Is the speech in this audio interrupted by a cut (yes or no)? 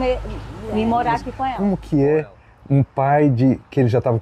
yes